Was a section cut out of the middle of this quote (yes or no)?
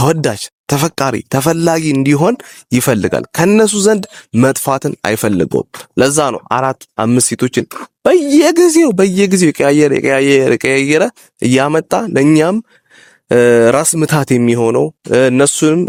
no